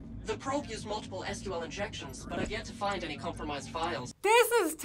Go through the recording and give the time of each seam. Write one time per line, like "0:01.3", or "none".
none